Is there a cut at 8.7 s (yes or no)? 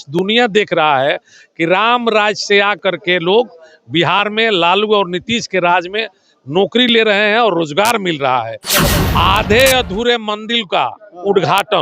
yes